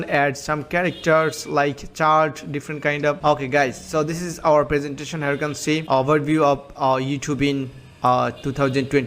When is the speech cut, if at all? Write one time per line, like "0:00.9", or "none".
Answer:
0:03.2
0:05.8